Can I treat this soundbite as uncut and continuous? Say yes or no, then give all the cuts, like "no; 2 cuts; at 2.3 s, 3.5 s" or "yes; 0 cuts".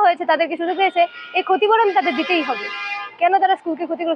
yes; 0 cuts